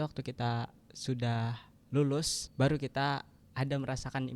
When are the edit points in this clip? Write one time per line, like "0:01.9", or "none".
0:01.7
0:02.4
0:03.4